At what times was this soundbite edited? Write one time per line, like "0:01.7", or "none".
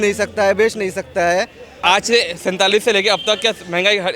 0:01.6